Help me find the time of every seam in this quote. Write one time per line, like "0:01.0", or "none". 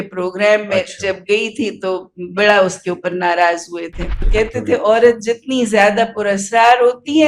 0:04.2